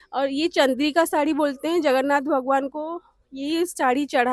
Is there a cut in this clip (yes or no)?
no